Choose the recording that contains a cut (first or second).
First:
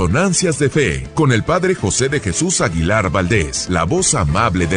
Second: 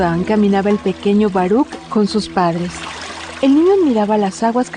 first